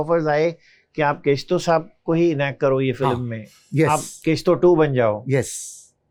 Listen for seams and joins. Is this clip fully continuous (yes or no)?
yes